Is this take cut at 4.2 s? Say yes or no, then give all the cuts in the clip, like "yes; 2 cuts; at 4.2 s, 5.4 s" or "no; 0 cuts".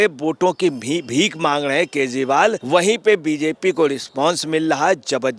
no; 1 cut; at 2.6 s